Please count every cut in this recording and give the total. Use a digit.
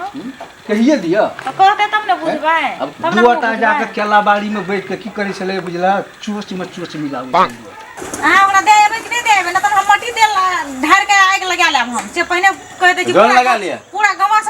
2